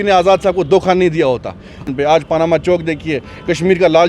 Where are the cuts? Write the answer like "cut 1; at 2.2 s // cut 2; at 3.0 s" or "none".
cut 1; at 1.8 s